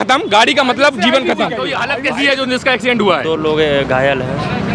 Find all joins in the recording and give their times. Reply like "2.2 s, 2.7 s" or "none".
1.8 s